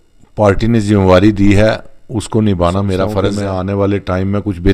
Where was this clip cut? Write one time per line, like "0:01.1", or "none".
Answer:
0:03.3